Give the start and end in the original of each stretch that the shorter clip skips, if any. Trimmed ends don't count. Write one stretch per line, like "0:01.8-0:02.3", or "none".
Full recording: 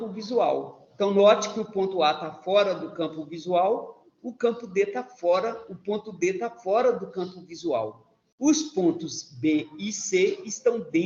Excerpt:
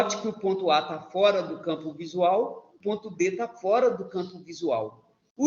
0:04.0-0:05.7